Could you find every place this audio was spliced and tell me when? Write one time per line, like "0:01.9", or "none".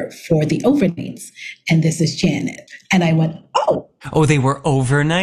0:03.9